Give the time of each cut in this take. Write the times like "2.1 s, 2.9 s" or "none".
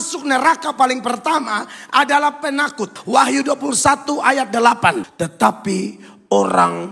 2.9 s, 5.1 s